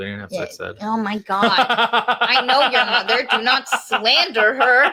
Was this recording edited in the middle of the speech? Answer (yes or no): no